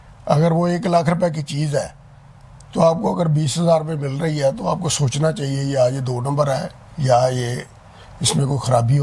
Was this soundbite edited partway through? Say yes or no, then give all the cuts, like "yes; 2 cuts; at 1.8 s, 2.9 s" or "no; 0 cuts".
no; 0 cuts